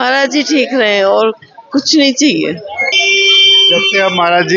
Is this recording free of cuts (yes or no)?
yes